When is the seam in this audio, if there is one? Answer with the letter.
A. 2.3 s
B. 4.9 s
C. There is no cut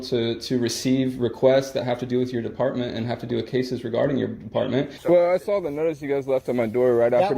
B